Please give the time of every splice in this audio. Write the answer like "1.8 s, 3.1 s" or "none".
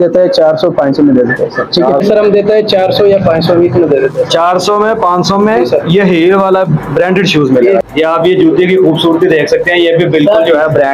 2.0 s, 7.8 s

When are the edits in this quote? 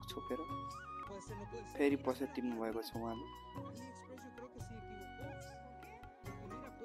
0.9 s

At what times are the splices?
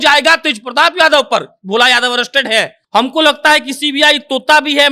2.8 s

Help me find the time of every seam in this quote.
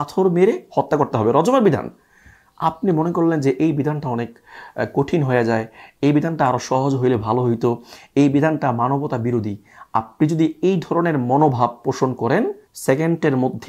12.7 s

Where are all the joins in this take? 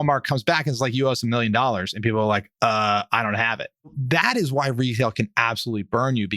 4.0 s

